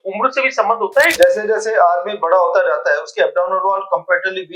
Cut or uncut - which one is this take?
cut